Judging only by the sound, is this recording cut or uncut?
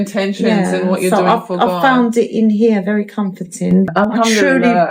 cut